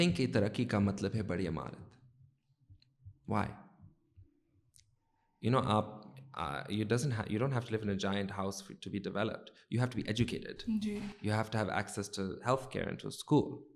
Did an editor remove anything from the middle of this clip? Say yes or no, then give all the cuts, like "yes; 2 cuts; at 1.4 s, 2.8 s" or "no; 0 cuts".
no; 0 cuts